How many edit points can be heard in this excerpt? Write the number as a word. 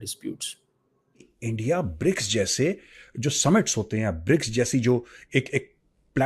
one